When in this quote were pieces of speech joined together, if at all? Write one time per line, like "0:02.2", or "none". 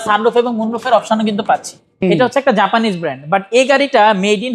0:01.8